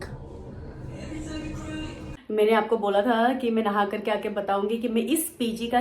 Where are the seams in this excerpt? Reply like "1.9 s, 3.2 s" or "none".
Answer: 2.1 s